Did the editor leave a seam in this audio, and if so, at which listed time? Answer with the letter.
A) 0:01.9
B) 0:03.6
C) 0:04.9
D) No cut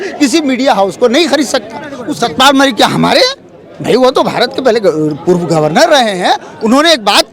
A